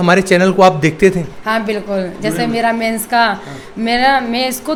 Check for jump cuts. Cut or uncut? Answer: uncut